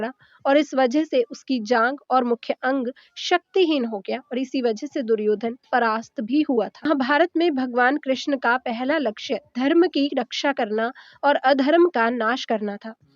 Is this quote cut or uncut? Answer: cut